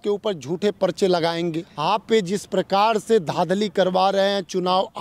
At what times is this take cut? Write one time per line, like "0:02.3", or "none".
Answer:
0:01.7